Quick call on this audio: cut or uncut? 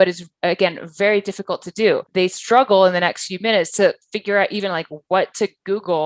cut